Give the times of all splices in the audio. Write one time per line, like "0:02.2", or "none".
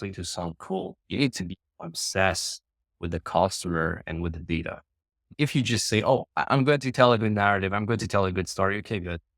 0:01.0